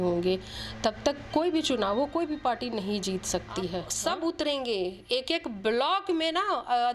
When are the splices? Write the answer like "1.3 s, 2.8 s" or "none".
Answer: 3.9 s